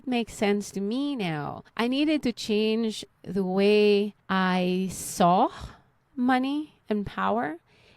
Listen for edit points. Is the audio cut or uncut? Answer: cut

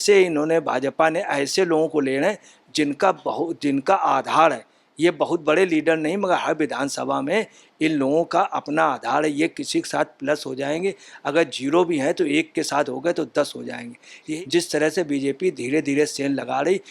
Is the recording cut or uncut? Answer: cut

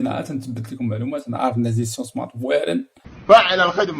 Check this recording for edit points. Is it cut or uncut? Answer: cut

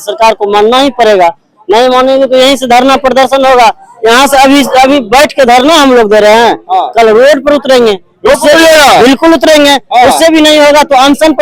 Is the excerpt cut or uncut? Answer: uncut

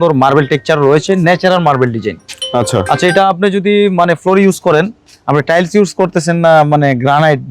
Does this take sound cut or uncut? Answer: uncut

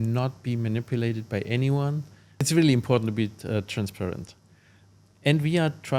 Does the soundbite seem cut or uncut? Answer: cut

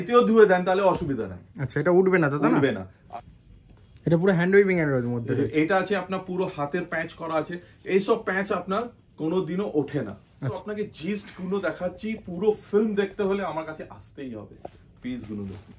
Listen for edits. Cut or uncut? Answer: cut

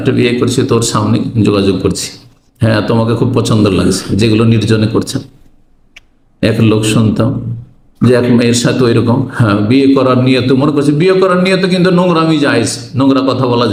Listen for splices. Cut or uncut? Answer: uncut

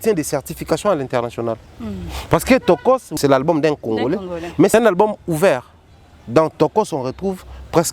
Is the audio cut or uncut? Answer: cut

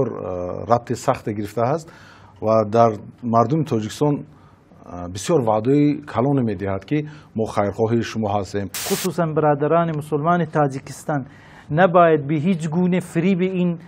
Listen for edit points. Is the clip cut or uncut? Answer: cut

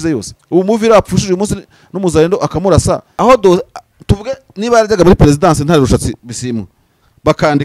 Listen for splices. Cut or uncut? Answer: cut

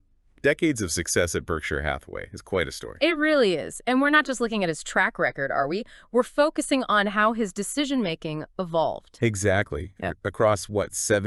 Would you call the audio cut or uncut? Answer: uncut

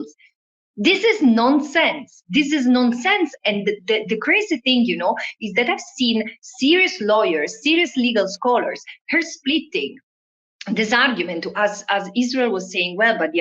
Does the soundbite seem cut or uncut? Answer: uncut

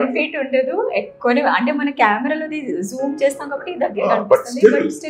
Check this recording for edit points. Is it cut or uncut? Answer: uncut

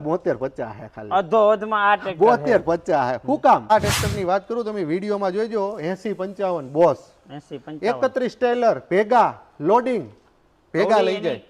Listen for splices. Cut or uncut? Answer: cut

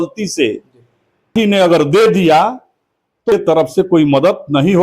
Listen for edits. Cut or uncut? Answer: cut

